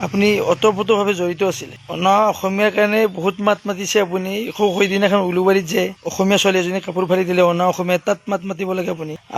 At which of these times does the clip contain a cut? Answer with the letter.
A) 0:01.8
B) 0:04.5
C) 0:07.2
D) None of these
A